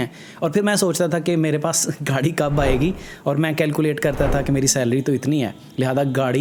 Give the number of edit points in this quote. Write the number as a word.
zero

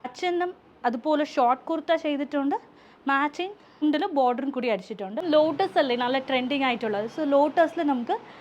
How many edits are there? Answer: one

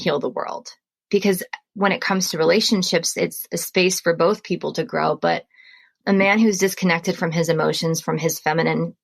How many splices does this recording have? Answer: one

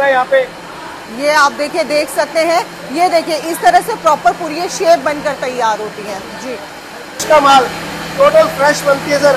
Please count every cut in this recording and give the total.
one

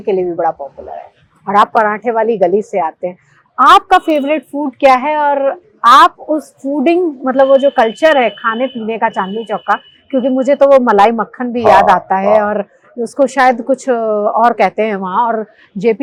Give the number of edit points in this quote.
zero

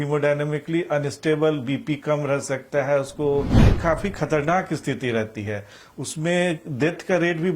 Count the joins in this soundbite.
one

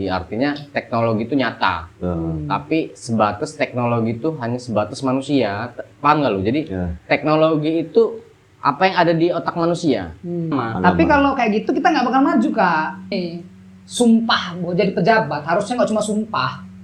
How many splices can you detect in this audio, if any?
two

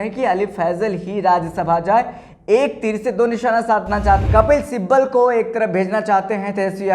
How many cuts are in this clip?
one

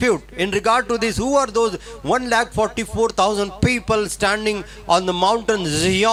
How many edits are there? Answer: zero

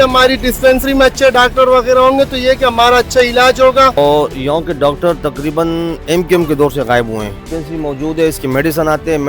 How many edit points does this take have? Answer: two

